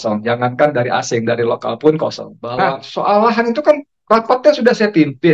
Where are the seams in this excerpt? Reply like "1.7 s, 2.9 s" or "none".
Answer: 2.9 s